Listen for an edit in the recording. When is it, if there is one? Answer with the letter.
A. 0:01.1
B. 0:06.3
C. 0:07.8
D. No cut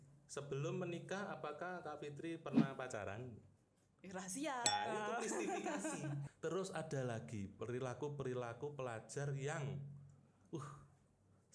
B